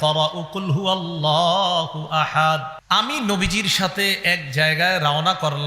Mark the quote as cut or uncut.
cut